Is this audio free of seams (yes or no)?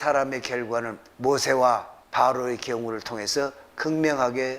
no